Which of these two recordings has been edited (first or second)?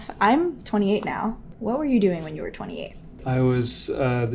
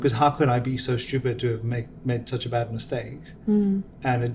first